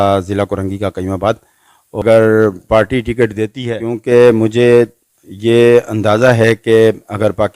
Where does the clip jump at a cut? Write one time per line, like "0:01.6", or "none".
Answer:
0:02.0